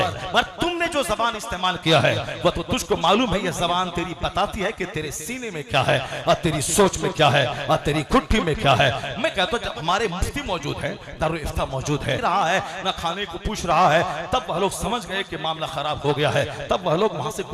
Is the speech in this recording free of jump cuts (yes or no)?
no